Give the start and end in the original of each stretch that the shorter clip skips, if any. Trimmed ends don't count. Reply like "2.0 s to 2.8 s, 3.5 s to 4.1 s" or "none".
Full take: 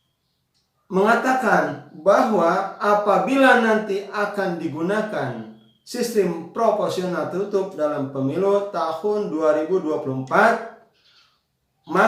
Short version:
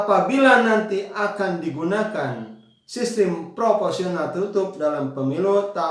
none